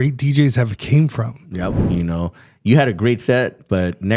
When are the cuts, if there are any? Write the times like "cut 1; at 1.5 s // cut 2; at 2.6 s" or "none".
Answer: cut 1; at 1.8 s